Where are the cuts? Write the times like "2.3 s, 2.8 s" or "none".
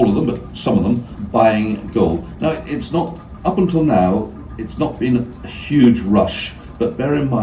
1.1 s

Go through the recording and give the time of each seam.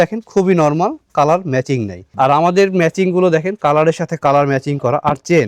none

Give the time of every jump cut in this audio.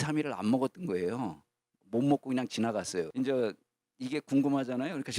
3.1 s

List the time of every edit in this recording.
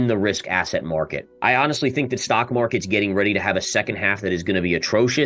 1.3 s

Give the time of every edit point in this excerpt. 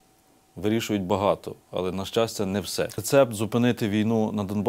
3.0 s

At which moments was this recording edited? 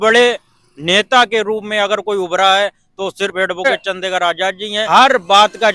4.7 s

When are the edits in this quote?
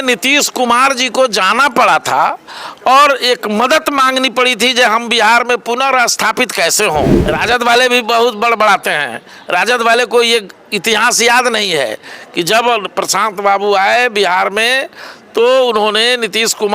7.2 s

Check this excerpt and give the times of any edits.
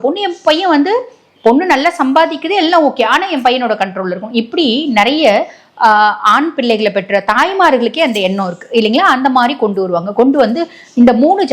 none

